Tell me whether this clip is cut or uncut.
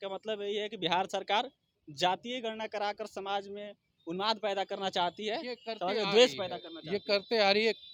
uncut